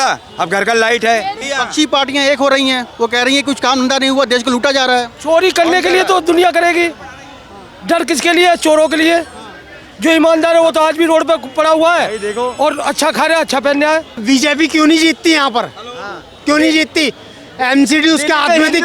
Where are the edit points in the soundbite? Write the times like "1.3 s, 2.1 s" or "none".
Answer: 1.4 s, 14.2 s

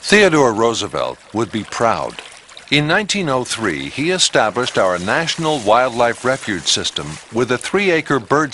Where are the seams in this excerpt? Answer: 4.9 s

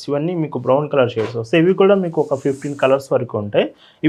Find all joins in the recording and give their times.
none

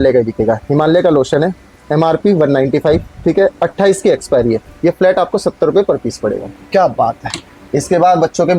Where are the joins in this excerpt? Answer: none

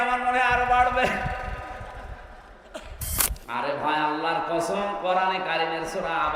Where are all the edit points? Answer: 3.3 s

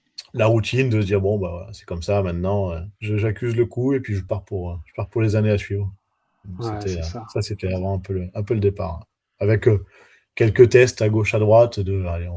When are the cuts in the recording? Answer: none

